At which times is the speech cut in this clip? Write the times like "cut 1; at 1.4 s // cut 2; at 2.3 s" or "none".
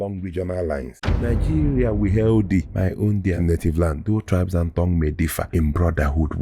cut 1; at 1.2 s